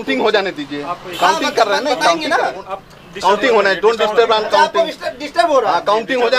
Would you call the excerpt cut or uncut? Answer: uncut